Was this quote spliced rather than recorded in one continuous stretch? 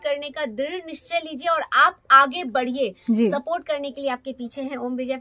no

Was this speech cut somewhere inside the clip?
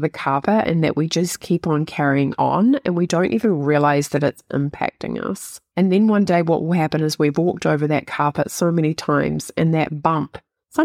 yes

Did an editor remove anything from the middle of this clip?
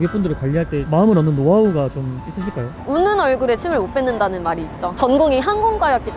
yes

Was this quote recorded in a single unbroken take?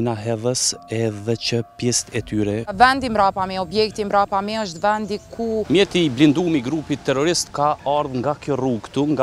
no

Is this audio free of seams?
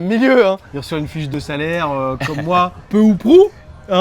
no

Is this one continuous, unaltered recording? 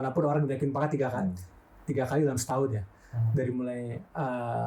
yes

